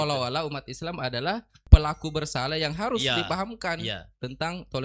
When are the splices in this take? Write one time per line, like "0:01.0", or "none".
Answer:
0:01.6

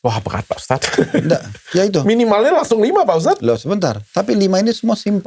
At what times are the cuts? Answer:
none

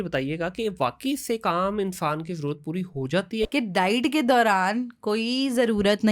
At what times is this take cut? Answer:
0:03.5

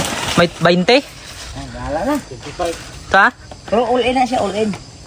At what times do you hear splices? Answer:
none

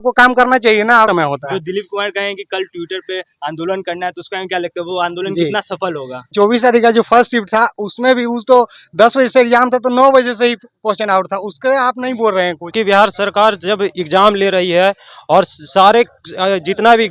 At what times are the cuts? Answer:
0:01.1
0:06.2
0:12.7

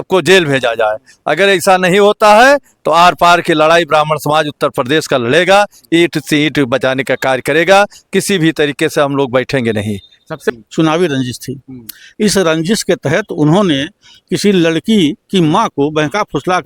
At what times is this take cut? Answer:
0:10.5

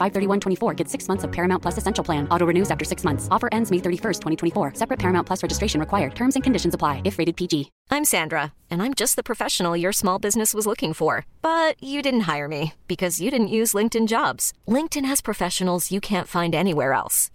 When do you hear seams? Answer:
0:07.7

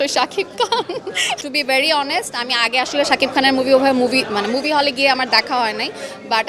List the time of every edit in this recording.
0:01.4

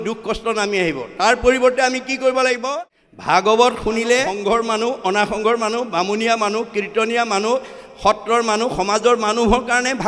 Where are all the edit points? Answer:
0:02.6
0:04.3

